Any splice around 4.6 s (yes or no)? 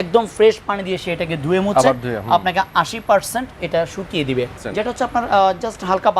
yes